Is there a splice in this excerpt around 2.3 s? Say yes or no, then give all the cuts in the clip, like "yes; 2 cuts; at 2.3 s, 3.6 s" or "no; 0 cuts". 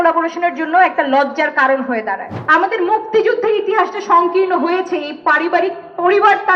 yes; 1 cut; at 2.3 s